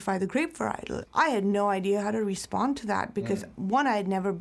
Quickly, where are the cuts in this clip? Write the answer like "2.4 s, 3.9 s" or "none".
0.9 s